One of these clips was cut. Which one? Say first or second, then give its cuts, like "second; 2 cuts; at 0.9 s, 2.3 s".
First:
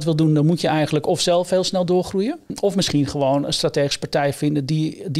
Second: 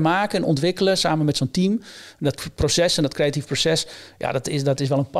first; 1 cut; at 2.5 s